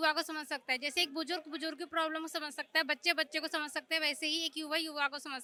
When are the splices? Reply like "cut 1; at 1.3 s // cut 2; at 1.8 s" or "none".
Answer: none